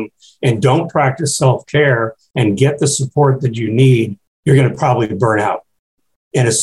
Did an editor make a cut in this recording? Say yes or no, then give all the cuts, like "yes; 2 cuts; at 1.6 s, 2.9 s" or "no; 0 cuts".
yes; 1 cut; at 4.3 s